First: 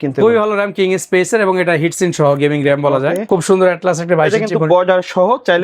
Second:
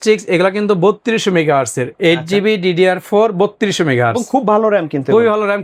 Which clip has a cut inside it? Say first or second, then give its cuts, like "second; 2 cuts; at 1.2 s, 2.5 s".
first; 1 cut; at 3.2 s